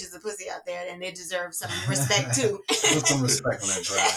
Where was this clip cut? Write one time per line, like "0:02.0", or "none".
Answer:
none